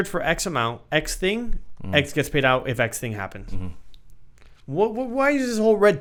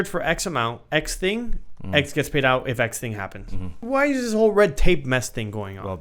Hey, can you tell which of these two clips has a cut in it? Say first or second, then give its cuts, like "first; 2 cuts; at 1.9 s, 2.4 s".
second; 1 cut; at 3.8 s